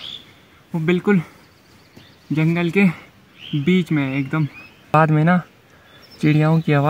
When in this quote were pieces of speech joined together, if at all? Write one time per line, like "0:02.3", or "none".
0:04.9